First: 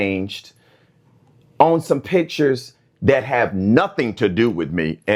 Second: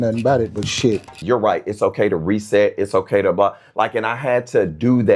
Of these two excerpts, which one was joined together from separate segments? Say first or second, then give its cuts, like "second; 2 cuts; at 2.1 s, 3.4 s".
second; 1 cut; at 1.2 s